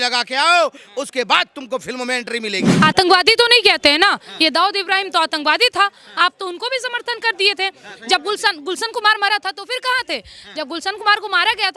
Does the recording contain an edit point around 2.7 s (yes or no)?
yes